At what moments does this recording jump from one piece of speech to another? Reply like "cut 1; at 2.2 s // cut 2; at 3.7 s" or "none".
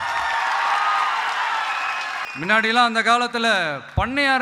cut 1; at 2.2 s